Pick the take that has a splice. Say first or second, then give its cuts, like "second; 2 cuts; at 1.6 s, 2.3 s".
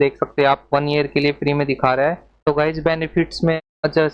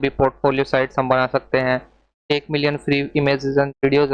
first; 1 cut; at 2.3 s